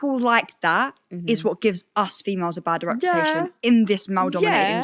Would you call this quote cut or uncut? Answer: uncut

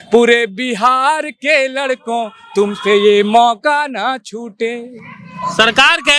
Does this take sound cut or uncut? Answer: uncut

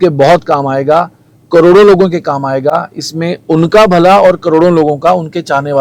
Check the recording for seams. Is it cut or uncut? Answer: uncut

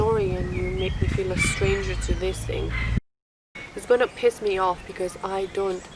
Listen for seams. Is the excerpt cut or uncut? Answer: cut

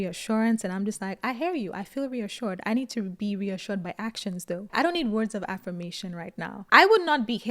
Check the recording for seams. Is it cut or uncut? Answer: cut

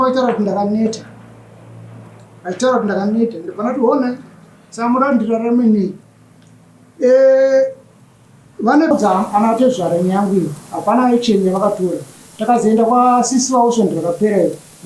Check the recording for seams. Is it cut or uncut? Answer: cut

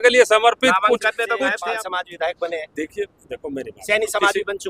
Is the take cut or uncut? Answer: cut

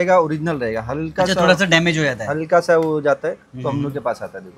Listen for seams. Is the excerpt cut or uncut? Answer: uncut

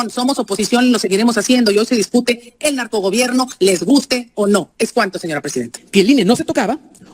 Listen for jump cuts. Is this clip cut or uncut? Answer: cut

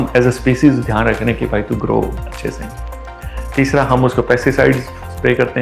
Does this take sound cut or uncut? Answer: uncut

